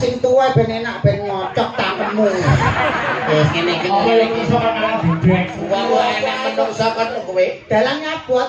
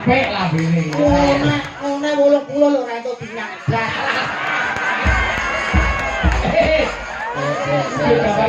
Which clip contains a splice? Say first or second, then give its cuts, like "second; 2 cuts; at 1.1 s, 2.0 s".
first; 1 cut; at 7.2 s